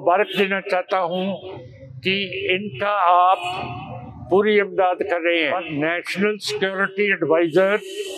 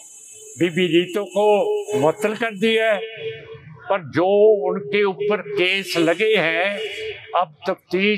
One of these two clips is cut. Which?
first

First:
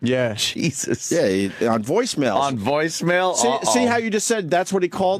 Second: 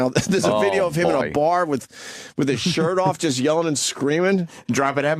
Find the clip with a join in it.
first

